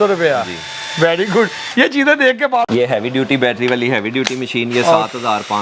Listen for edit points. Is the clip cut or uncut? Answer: cut